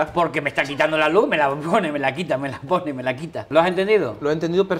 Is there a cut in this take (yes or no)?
yes